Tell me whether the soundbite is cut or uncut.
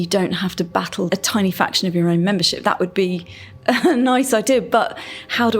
cut